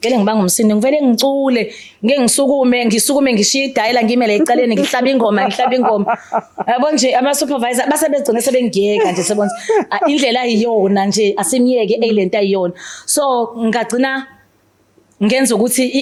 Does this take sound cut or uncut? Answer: uncut